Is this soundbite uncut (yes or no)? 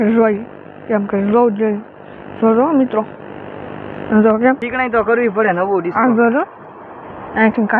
no